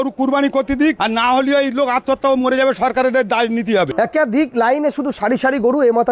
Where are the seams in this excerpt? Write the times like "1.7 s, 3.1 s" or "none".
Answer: 1.0 s, 3.9 s